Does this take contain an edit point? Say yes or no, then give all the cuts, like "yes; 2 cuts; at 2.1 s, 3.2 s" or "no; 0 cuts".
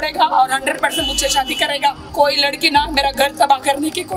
yes; 1 cut; at 2.0 s